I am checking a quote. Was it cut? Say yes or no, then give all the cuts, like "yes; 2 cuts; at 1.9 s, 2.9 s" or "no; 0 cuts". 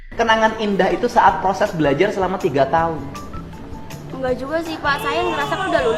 no; 0 cuts